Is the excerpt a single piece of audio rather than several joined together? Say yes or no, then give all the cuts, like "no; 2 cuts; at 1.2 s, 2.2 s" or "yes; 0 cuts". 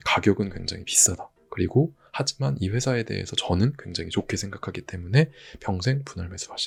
yes; 0 cuts